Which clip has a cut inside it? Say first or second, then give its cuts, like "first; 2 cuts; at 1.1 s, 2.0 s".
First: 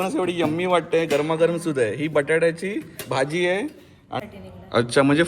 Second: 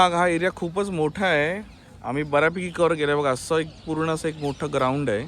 first; 1 cut; at 4.2 s